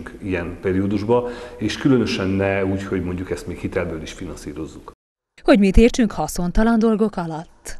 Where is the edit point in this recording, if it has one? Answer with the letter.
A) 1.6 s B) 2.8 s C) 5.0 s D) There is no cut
D